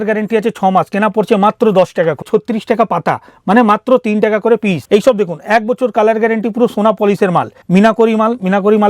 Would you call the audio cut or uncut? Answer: cut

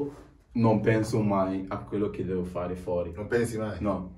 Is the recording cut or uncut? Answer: uncut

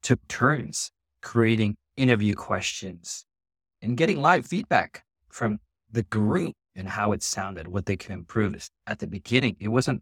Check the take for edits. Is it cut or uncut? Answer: cut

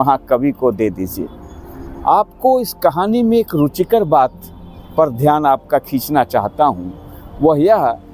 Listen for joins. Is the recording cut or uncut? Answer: uncut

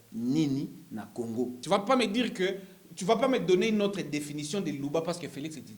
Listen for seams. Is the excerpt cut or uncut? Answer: cut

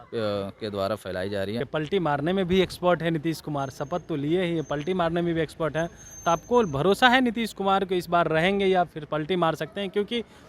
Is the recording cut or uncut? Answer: cut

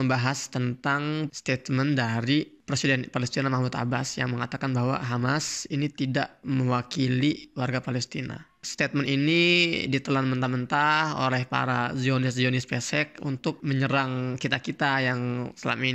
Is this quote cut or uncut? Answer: cut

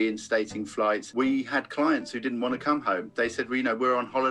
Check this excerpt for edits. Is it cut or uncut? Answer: cut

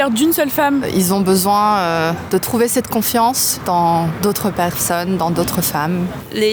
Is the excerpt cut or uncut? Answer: uncut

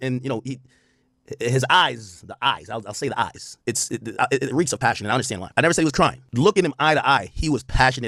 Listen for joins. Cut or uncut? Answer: uncut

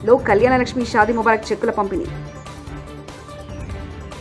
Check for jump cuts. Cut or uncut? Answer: uncut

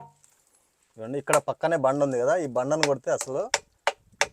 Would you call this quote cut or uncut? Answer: uncut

